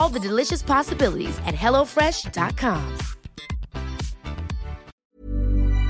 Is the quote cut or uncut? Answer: cut